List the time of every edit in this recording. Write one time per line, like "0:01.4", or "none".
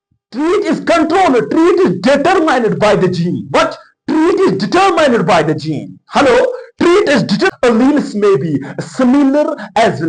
0:07.5

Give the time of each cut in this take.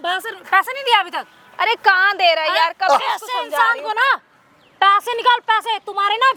none

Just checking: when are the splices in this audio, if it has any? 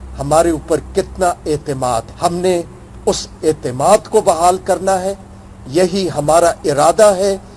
0:02.1

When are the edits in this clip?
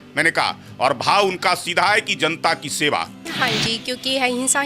0:03.2

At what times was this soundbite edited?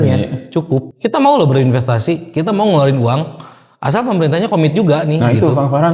0:00.9

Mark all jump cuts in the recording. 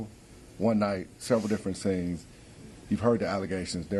none

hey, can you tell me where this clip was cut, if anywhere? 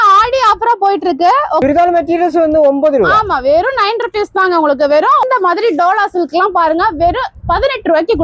0:01.6
0:05.2

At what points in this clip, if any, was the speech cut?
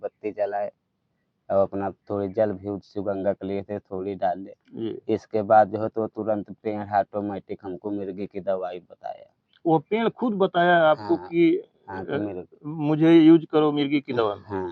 none

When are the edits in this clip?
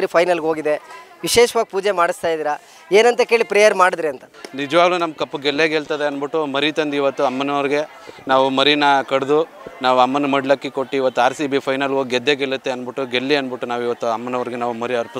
0:04.3

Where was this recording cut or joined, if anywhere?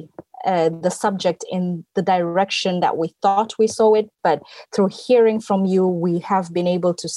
none

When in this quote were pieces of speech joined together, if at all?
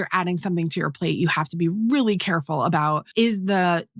0:03.0

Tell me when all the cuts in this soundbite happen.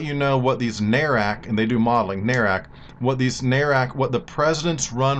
0:04.3

